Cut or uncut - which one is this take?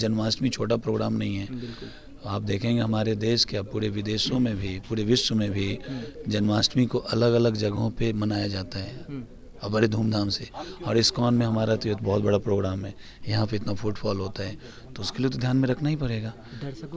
uncut